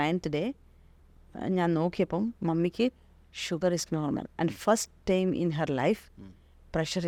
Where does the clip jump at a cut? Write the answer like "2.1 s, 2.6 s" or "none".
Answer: none